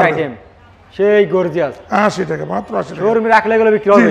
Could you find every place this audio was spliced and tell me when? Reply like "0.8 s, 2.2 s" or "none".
none

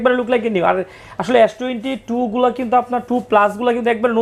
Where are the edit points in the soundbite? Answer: none

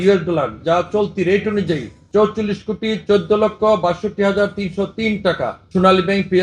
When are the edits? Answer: 1.9 s, 5.6 s

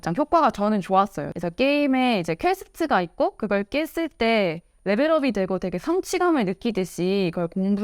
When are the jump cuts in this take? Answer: 1.3 s

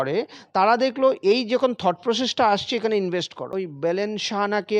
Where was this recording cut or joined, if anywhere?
3.5 s

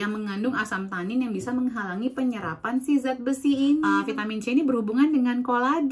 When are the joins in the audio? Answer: 4.0 s

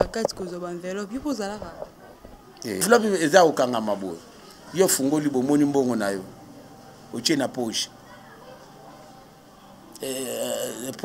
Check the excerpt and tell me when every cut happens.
2.8 s

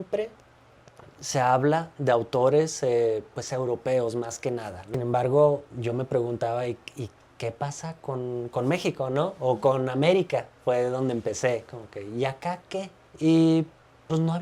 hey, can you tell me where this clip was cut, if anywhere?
4.9 s, 13.0 s

